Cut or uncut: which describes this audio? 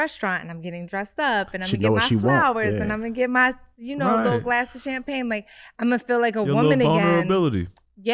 uncut